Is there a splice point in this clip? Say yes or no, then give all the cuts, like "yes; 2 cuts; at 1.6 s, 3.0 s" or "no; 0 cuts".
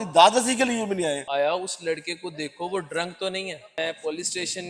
yes; 2 cuts; at 1.2 s, 3.6 s